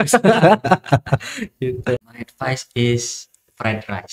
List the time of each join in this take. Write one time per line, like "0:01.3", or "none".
0:02.1